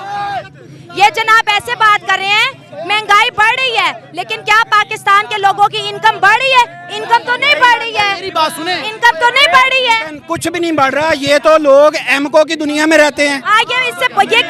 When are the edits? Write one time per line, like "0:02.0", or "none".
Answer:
none